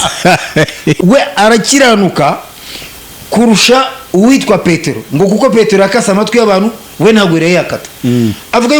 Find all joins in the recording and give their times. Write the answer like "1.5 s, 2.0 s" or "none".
1.0 s